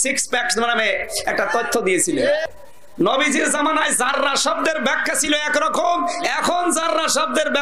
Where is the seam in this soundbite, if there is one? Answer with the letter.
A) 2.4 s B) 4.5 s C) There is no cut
A